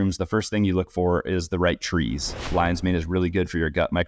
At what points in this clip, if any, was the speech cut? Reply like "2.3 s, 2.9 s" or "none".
2.5 s